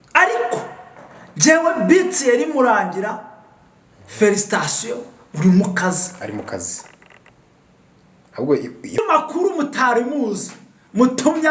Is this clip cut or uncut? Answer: cut